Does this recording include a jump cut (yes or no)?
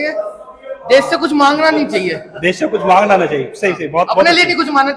no